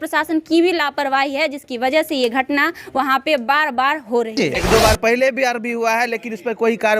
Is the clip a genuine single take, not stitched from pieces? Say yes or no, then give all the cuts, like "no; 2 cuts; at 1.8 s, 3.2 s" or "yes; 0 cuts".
no; 1 cut; at 4.4 s